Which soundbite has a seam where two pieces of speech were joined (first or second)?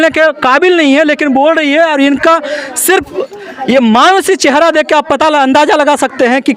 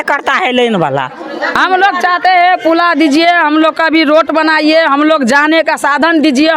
second